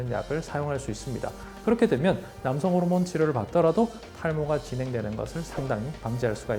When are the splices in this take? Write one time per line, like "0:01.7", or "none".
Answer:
none